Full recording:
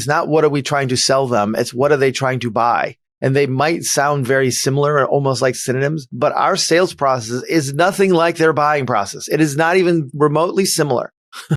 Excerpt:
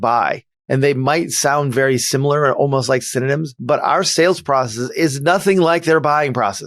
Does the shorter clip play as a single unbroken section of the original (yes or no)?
yes